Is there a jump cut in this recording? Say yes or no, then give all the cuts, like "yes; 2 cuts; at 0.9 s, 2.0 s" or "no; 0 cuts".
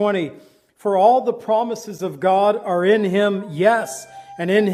no; 0 cuts